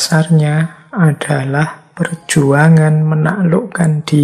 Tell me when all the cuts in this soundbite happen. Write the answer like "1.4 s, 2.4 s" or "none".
none